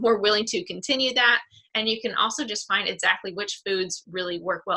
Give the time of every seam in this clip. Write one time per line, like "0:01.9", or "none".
none

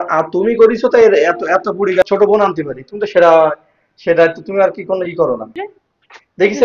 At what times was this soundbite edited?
0:02.0
0:05.6

